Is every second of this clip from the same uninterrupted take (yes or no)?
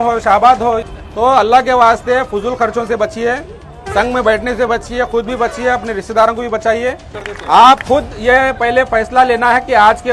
no